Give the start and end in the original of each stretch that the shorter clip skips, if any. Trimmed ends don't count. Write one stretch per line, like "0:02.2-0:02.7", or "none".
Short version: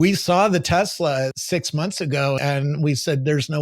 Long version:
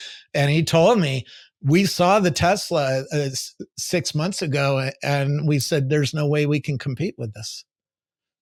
0:03.1-0:03.8
0:04.8-0:05.0